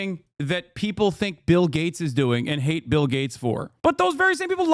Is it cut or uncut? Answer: cut